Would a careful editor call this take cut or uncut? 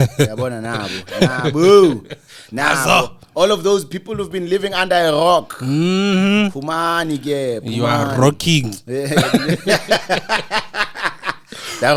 uncut